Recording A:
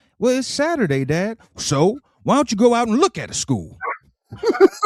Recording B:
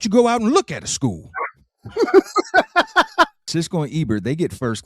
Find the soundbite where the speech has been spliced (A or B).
B